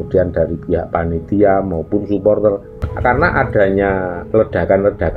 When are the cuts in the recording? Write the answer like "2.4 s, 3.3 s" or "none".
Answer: 2.9 s